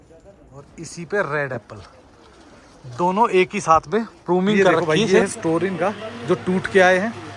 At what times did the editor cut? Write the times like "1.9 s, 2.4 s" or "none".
4.9 s